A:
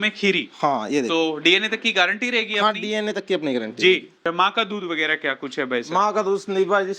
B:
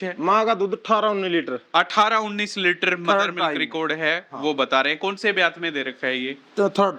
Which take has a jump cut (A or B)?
A